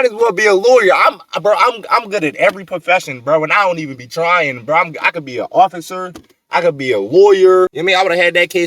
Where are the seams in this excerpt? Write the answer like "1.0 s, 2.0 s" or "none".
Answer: 7.8 s

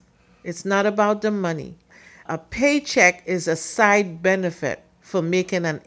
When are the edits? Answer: 2.2 s

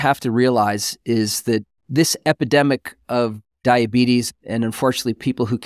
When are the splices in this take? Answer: 3.4 s

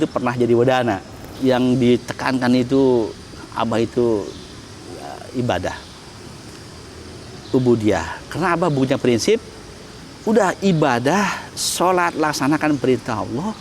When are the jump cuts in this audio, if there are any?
1.3 s

